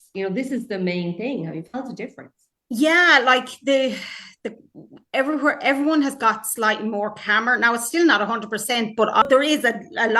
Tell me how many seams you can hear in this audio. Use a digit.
1